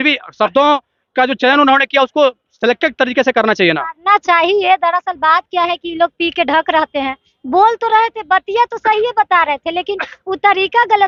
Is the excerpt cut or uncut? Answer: uncut